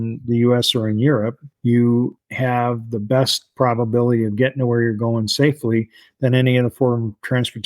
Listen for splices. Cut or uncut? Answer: cut